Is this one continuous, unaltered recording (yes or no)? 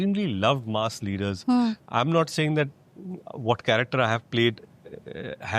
yes